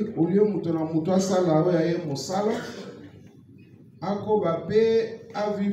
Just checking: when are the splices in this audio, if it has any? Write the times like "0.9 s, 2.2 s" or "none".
none